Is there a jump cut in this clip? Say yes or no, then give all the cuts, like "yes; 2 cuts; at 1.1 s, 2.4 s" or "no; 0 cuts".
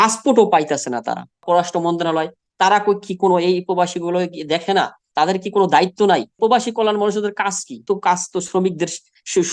yes; 3 cuts; at 1.3 s, 6.4 s, 7.8 s